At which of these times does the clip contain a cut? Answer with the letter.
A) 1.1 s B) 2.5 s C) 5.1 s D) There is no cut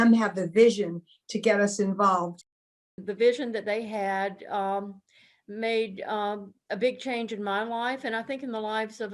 B